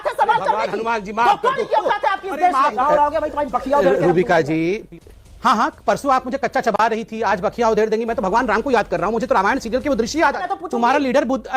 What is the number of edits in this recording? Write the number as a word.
two